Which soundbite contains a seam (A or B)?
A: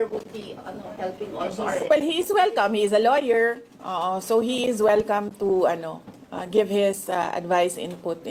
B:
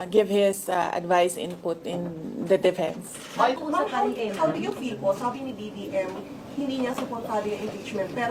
B